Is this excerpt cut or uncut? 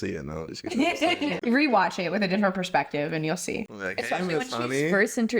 cut